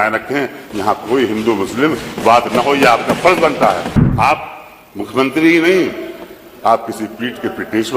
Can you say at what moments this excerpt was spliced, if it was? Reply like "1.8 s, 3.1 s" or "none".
4.0 s